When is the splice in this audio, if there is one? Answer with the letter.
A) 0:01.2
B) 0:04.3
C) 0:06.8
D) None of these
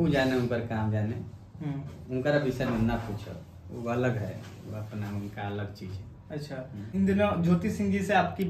C